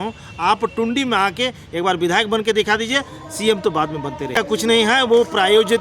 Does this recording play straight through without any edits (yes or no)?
no